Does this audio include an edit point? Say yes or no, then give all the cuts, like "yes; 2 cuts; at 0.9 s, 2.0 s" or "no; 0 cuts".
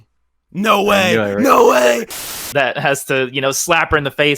yes; 1 cut; at 2.2 s